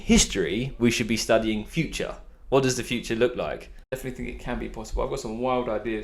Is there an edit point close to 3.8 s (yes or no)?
yes